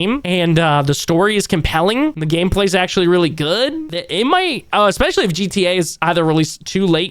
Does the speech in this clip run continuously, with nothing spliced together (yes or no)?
no